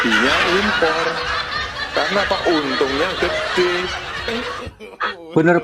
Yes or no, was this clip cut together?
no